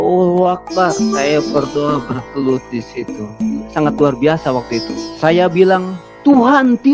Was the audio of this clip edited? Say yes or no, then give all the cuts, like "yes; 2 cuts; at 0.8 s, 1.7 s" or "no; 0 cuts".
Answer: yes; 2 cuts; at 1.0 s, 3.4 s